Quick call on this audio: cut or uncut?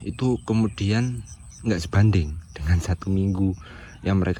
uncut